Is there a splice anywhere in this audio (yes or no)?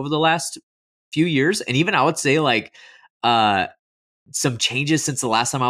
no